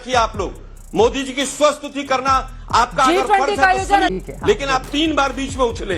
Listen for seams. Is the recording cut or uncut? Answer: cut